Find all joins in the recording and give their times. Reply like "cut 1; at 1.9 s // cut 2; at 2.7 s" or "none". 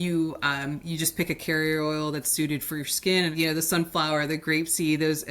cut 1; at 3.3 s